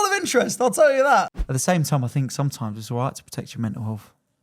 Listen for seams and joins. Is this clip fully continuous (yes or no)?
no